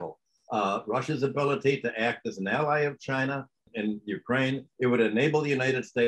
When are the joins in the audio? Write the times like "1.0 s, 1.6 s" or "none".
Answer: none